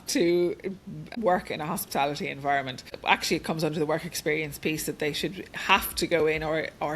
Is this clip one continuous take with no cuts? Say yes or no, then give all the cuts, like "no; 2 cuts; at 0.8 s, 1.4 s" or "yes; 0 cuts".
no; 2 cuts; at 0.9 s, 3.0 s